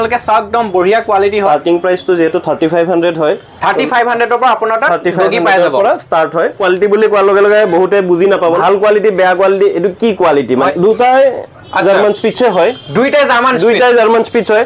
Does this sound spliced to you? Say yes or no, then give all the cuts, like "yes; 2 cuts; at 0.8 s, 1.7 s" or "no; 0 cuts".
yes; 4 cuts; at 1.5 s, 6.6 s, 8.6 s, 10.7 s